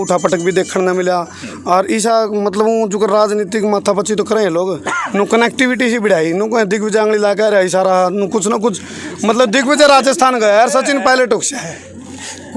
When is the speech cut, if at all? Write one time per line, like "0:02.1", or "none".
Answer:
none